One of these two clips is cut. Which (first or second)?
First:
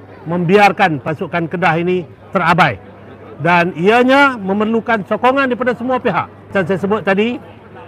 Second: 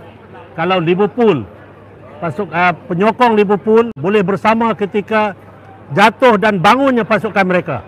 first